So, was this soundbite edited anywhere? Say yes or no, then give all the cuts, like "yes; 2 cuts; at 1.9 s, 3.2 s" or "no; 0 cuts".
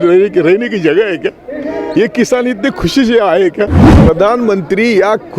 yes; 1 cut; at 3.9 s